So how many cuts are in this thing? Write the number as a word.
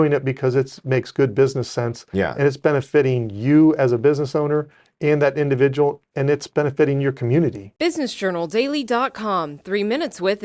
one